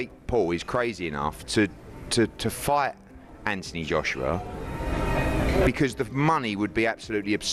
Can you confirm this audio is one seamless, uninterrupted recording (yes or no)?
yes